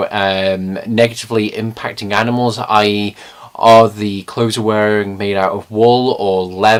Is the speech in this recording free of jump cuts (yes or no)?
yes